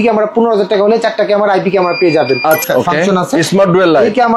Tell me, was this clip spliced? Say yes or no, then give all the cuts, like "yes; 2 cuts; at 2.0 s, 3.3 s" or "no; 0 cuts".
yes; 1 cut; at 2.6 s